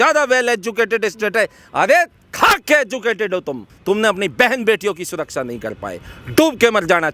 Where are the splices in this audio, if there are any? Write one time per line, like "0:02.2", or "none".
none